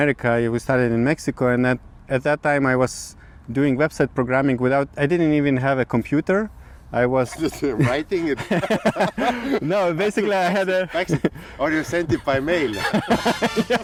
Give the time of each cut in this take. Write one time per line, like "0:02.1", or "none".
none